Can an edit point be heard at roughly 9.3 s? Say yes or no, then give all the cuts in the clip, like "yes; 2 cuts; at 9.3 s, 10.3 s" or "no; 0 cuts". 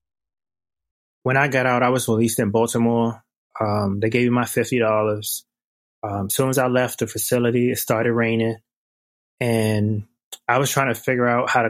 no; 1 cut; at 1.1 s